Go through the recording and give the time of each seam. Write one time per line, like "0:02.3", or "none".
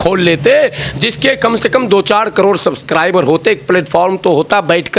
none